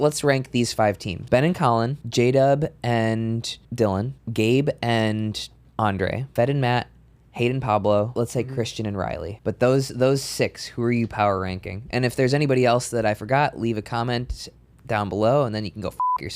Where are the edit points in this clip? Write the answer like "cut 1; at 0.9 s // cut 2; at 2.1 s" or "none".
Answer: cut 1; at 1.1 s // cut 2; at 2.0 s // cut 3; at 3.6 s // cut 4; at 4.2 s // cut 5; at 6.2 s // cut 6; at 8.2 s // cut 7; at 9.3 s